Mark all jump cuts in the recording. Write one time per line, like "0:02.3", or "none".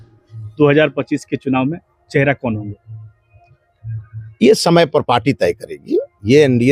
none